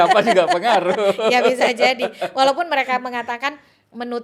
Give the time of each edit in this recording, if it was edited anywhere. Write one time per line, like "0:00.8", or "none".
none